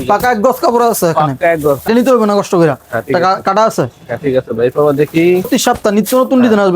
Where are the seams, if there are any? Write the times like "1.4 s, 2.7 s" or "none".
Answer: 1.9 s, 5.5 s